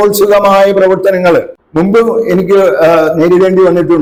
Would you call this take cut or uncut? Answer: uncut